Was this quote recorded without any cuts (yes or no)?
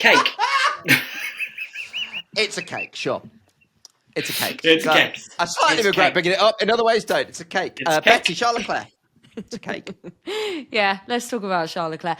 yes